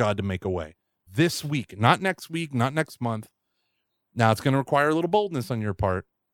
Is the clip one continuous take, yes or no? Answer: no